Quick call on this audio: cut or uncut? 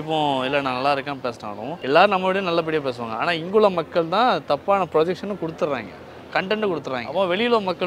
cut